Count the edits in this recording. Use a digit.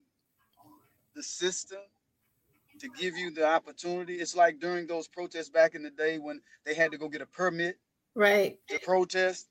0